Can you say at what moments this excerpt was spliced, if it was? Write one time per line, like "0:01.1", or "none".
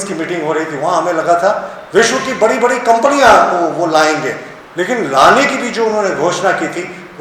none